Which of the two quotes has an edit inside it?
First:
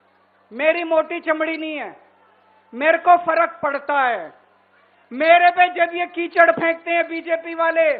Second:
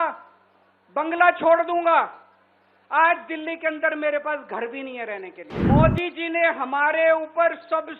second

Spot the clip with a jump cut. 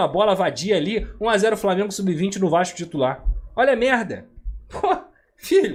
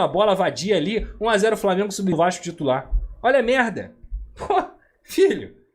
second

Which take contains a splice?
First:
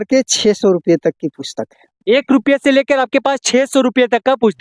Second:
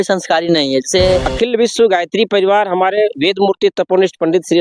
second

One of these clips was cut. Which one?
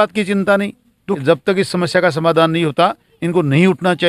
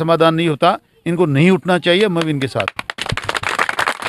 first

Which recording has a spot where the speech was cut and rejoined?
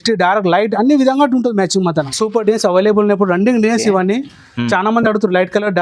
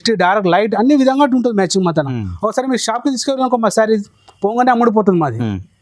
first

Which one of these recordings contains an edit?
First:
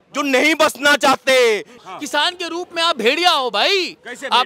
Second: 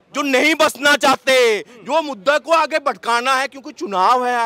first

